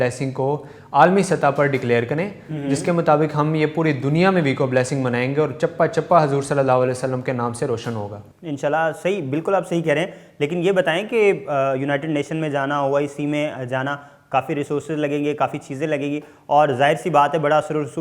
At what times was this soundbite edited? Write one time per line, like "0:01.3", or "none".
none